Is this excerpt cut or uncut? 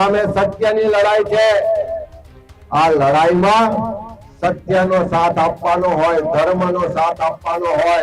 uncut